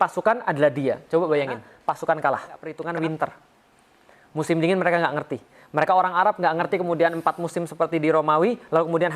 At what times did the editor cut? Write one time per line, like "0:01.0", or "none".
0:01.7
0:02.7